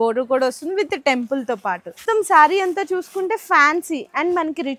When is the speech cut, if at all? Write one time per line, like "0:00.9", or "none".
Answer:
0:02.0